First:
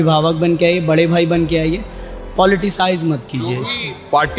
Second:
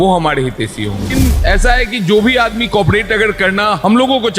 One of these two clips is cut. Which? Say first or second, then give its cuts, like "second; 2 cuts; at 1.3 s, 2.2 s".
second; 1 cut; at 1.1 s